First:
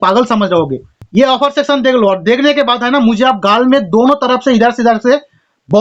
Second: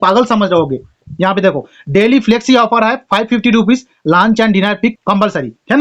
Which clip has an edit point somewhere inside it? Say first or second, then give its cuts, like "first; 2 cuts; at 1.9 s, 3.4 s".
first; 1 cut; at 1.0 s